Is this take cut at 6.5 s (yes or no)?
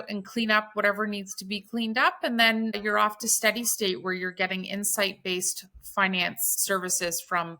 yes